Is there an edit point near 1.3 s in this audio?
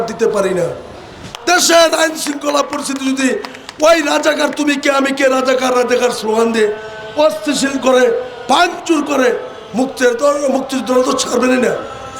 yes; 1 cut; at 1.3 s

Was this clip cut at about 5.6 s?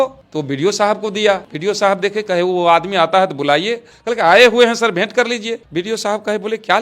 yes; 2 cuts; at 1.5 s, 5.6 s

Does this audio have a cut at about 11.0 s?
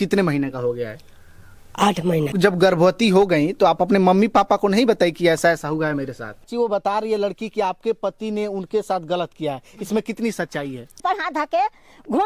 yes; 3 cuts; at 2.3 s, 6.4 s, 11.0 s

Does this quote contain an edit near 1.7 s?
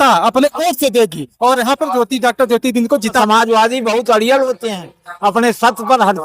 no; 1 cut; at 3.2 s

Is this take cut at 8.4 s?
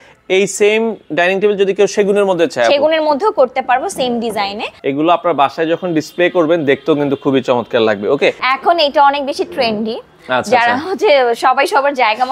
yes; 2 cuts; at 4.7 s, 8.4 s

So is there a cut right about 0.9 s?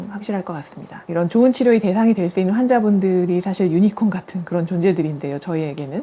yes; 1 cut; at 0.9 s

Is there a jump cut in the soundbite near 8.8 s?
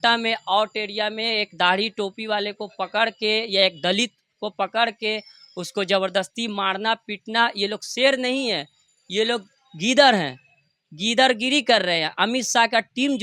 no; 0 cuts

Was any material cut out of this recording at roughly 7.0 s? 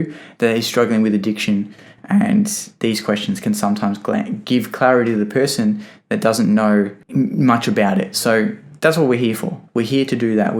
yes; 1 cut; at 7.0 s

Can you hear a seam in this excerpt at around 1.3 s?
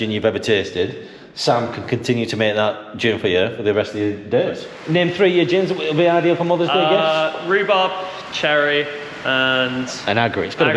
no; 1 cut; at 4.7 s

